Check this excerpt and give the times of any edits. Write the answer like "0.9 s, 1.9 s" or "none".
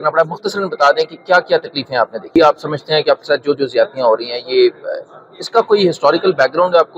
2.3 s